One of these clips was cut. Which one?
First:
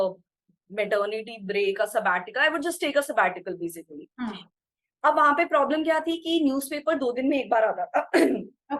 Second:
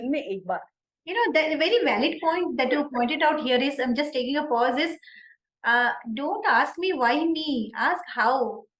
first; 1 cut; at 4.5 s

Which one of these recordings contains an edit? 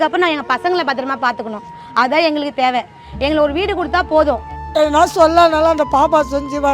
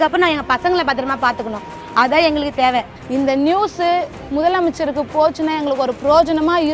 second; 1 cut; at 3.0 s

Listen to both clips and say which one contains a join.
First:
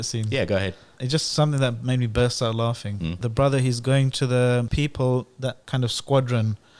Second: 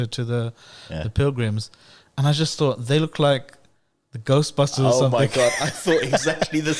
first; 4 cuts; at 1.0 s, 3.2 s, 4.7 s, 5.6 s

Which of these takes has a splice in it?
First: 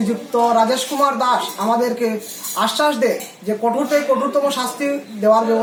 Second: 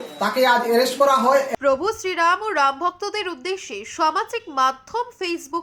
second; 1 cut; at 1.1 s

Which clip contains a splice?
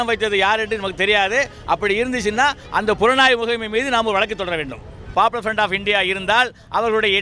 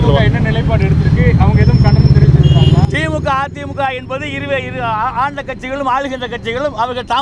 first; 1 cut; at 5.0 s

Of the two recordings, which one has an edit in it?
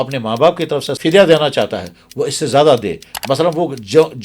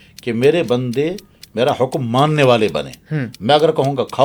first; 1 cut; at 0.9 s

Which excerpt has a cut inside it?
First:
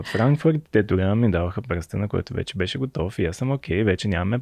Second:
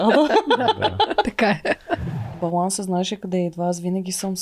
second; 1 cut; at 2.3 s

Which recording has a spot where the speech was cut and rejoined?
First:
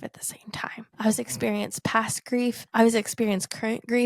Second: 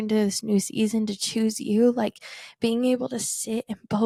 first; 2 cuts; at 0.9 s, 2.6 s

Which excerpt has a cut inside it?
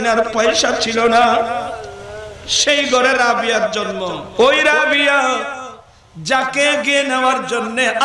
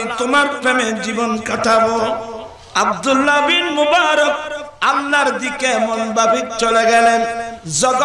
first; 1 cut; at 4.2 s

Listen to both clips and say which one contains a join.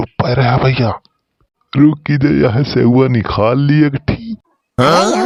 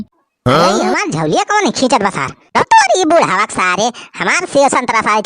second; 1 cut; at 2.5 s

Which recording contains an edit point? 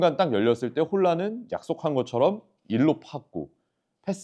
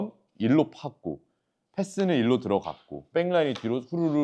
second; 1 cut; at 3.1 s

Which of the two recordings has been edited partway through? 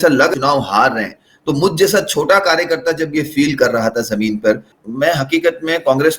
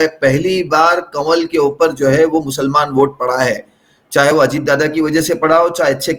first; 1 cut; at 4.7 s

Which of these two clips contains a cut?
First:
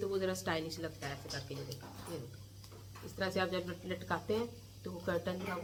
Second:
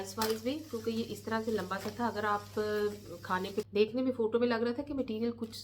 second; 1 cut; at 3.6 s

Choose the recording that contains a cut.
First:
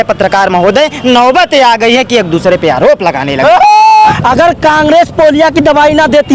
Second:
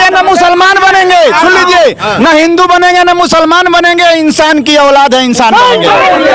first; 1 cut; at 4.1 s

